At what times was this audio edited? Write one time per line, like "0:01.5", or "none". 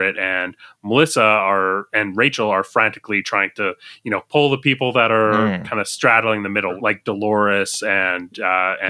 0:06.8